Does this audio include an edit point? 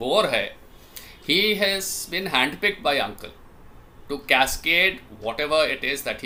no; 0 cuts

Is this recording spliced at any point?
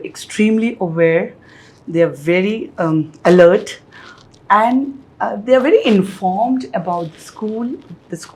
no; 0 cuts

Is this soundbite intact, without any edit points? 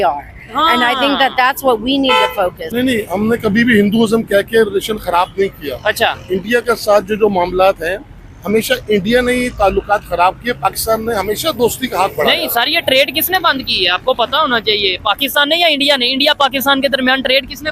no; 1 cut; at 2.6 s

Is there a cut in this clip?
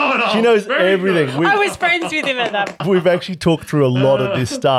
yes; 1 cut; at 2.8 s

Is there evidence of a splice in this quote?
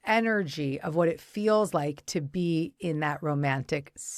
no; 0 cuts

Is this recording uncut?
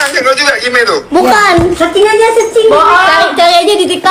yes; 0 cuts

